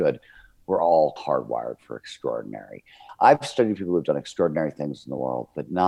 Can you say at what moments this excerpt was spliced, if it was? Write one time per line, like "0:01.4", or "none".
0:01.2
0:03.0